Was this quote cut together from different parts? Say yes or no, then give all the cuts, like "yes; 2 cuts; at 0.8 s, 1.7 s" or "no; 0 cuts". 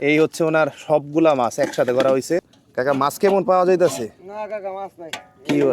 yes; 1 cut; at 2.6 s